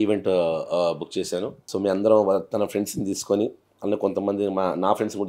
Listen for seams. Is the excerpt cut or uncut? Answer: cut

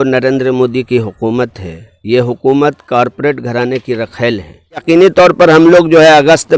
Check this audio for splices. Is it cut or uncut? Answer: cut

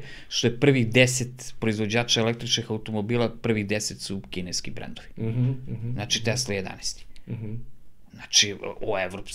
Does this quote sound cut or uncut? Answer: uncut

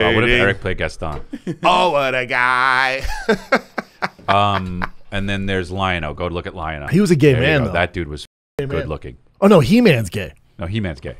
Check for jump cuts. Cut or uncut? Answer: cut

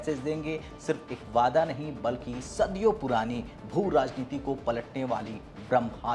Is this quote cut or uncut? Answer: uncut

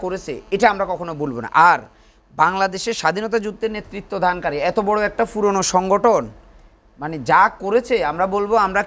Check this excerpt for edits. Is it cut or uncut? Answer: uncut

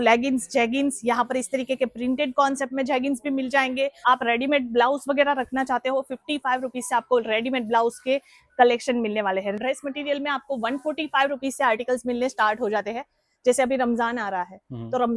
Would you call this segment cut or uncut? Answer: cut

